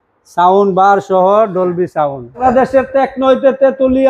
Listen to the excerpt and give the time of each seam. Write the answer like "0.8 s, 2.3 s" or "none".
2.4 s